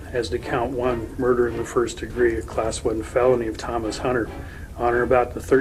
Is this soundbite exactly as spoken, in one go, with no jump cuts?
yes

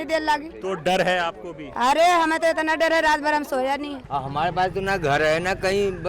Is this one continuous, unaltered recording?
no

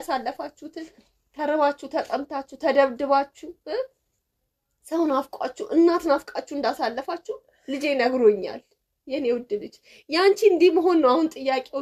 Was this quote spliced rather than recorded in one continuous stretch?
no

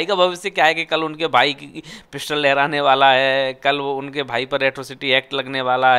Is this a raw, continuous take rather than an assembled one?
yes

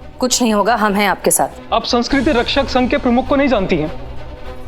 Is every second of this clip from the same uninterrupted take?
no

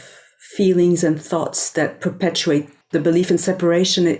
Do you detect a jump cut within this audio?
yes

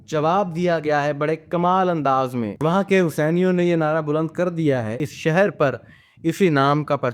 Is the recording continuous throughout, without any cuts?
no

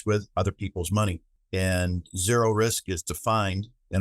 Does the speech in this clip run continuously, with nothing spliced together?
no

